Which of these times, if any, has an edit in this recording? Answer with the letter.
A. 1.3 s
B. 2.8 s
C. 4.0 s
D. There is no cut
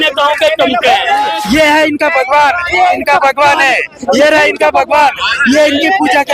A